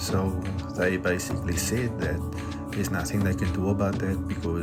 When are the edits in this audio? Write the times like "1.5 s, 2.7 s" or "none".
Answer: none